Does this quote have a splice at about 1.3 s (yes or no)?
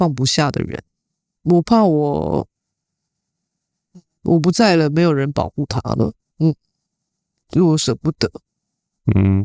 yes